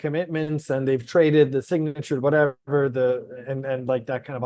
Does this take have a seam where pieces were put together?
no; 0 cuts

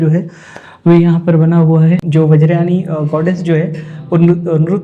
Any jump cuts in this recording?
yes; 1 cut; at 2.1 s

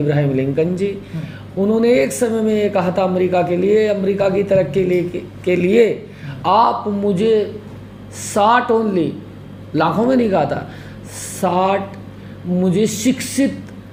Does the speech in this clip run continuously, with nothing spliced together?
yes; 0 cuts

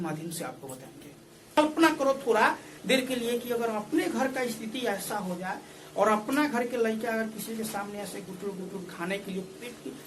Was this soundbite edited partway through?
yes; 1 cut; at 1.6 s

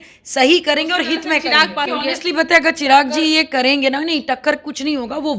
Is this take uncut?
no; 1 cut; at 1.9 s

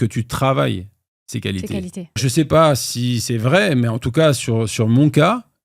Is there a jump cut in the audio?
yes; 1 cut; at 2.2 s

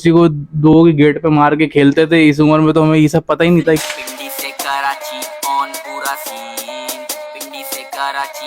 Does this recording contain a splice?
yes; 1 cut; at 3.8 s

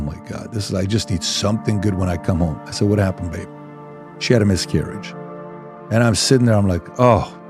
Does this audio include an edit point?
no; 0 cuts

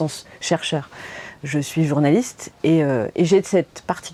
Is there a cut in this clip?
no; 0 cuts

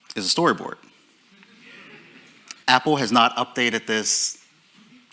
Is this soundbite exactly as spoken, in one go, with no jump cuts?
no; 1 cut; at 2.6 s

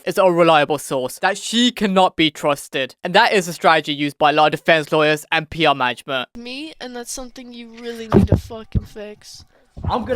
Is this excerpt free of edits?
no; 1 cut; at 6.3 s

